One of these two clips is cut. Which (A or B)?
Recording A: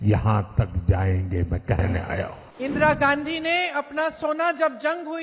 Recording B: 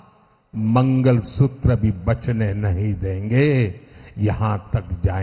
A